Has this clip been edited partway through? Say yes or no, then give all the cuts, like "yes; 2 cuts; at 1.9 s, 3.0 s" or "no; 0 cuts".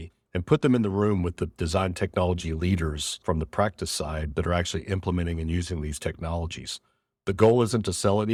no; 0 cuts